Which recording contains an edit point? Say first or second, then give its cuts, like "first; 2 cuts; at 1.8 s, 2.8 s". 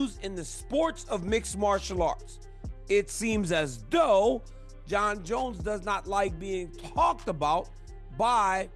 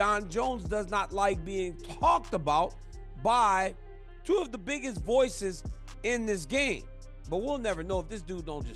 second; 1 cut; at 6.9 s